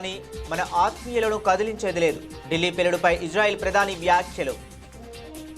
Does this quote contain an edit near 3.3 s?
no; 1 cut; at 4.7 s

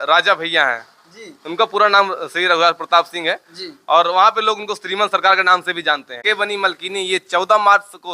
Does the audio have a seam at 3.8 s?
no; 1 cut; at 6.2 s

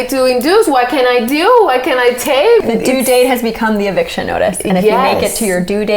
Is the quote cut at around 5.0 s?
no; 1 cut; at 2.6 s

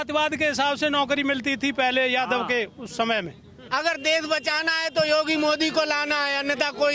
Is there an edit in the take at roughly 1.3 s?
no; 1 cut; at 3.6 s

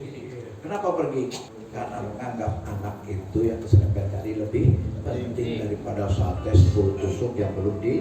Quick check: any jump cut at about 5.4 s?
no; 1 cut; at 1.6 s

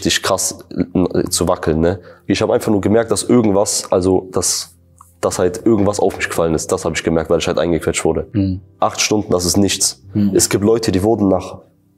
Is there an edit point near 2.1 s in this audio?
yes; 2 cuts; at 2.1 s, 8.2 s

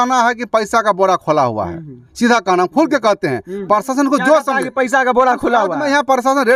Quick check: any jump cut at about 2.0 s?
no; 0 cuts

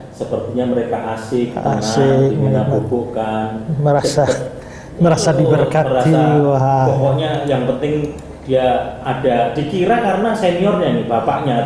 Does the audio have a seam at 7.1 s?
no; 0 cuts

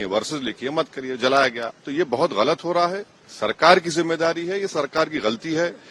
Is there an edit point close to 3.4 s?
no; 1 cut; at 1.6 s

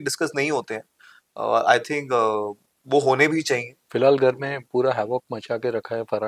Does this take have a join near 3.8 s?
yes; 1 cut; at 3.8 s

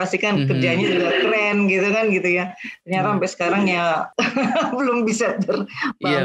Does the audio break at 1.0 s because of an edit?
no; 1 cut; at 4.1 s

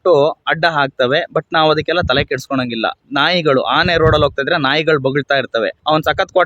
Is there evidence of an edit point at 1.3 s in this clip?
no; 0 cuts

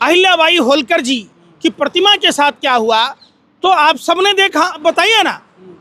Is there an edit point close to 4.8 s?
yes; 1 cut; at 4.8 s

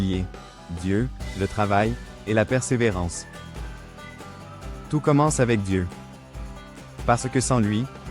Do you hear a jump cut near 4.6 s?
yes; 2 cuts; at 3.1 s, 4.6 s

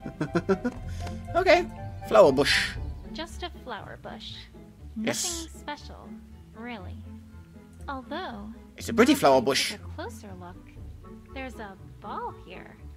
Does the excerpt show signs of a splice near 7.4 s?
no; 1 cut; at 3.2 s

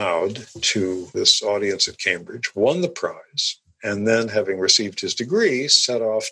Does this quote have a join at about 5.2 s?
no; 1 cut; at 1.1 s

